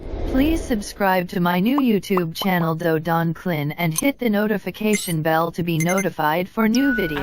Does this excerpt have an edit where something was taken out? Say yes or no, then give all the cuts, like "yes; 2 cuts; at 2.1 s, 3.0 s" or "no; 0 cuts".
no; 0 cuts